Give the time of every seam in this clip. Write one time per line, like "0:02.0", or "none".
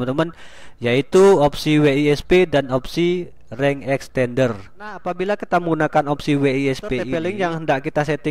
0:05.1
0:07.1